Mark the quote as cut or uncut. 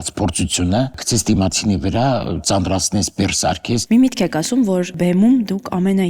cut